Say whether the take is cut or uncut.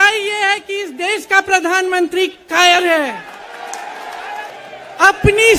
cut